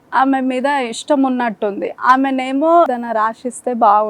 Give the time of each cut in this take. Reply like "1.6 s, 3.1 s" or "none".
2.9 s